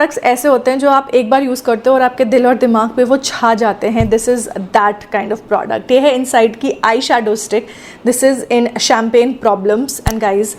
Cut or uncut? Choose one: uncut